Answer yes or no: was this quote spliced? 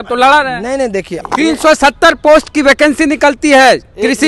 yes